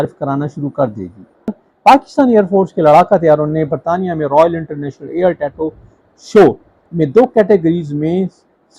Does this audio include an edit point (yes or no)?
yes